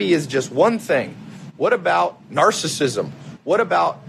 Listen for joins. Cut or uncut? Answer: uncut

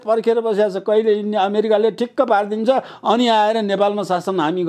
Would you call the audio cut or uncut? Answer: uncut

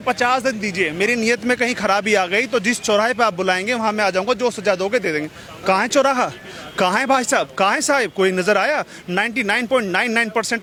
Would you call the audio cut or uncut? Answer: uncut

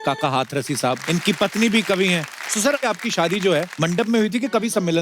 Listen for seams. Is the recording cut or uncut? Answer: cut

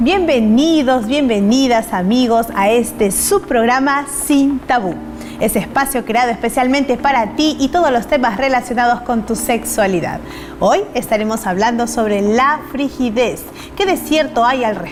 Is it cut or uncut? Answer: uncut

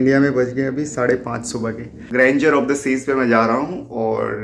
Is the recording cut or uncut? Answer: cut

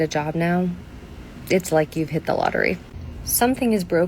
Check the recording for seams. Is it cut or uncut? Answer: cut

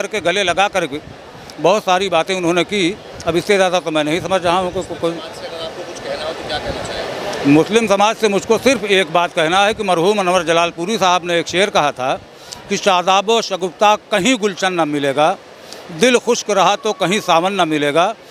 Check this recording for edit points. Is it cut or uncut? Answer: uncut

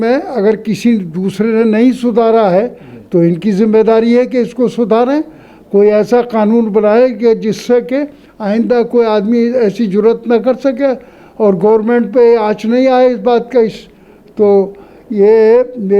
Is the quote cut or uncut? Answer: uncut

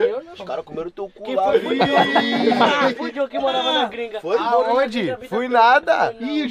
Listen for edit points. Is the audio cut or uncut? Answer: uncut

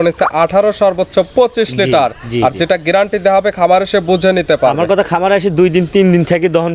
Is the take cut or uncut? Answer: uncut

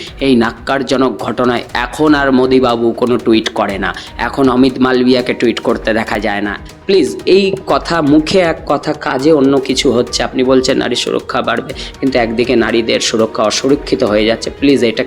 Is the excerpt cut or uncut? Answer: cut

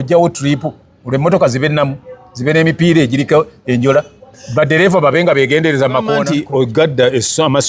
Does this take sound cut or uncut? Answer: cut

